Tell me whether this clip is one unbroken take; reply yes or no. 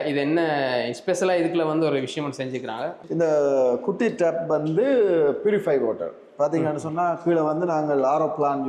yes